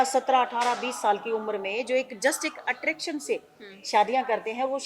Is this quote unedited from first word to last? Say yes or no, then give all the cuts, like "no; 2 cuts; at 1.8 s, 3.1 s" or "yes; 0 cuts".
yes; 0 cuts